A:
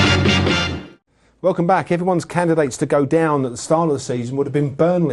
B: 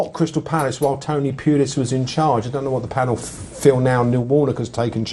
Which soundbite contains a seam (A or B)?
B